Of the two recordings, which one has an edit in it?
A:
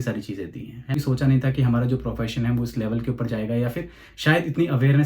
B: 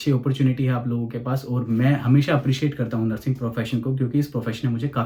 A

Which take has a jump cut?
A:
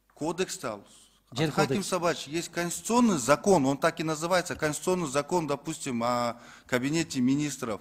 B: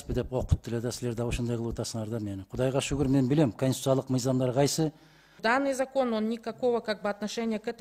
B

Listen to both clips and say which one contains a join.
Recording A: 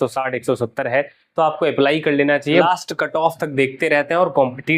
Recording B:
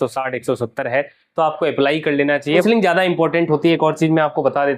A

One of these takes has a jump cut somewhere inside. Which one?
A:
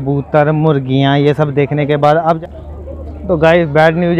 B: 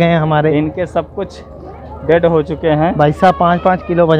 A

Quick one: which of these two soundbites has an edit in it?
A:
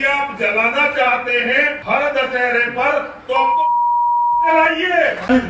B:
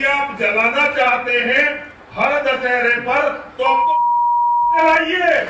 A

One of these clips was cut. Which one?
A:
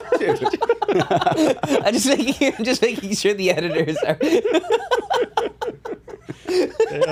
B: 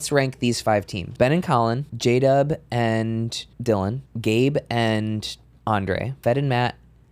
B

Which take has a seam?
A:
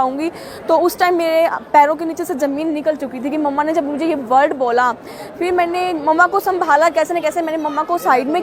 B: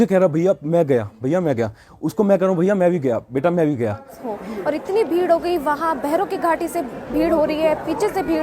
B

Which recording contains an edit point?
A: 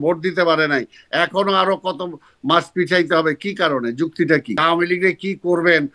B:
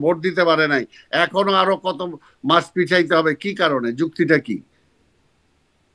A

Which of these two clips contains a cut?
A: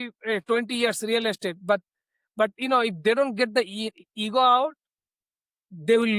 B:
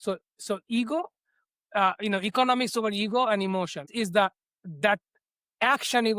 B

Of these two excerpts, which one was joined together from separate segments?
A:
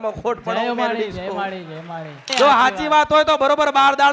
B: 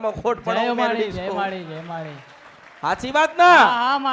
A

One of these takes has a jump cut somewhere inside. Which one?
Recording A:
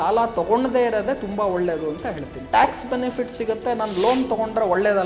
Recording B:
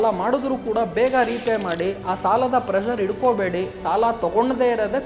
A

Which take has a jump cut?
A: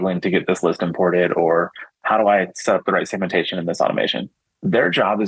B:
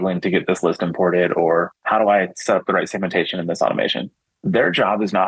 B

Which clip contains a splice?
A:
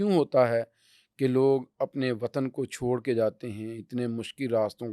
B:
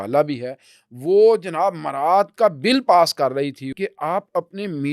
B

